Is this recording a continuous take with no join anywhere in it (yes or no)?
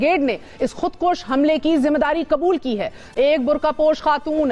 no